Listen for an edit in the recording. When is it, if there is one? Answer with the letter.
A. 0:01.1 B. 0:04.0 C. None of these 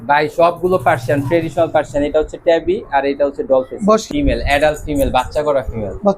B